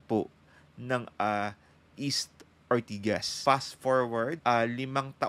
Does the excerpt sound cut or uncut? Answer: cut